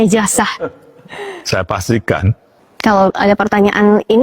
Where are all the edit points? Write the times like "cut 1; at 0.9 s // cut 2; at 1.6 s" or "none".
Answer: cut 1; at 2.5 s